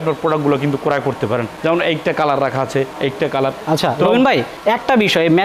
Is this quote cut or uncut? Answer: uncut